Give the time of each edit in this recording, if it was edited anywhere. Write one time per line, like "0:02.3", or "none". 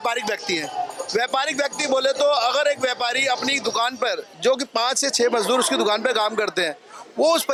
none